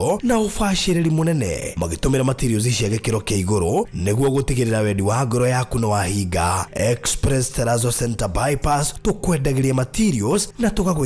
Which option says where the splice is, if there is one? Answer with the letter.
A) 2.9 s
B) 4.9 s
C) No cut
C